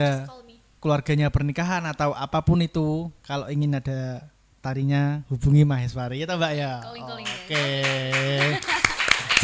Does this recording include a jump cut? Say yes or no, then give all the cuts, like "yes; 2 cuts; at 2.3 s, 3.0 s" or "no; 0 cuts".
no; 0 cuts